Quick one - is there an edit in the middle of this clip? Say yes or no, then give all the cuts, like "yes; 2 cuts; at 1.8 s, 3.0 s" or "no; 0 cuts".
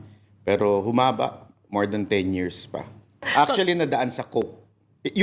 yes; 1 cut; at 3.3 s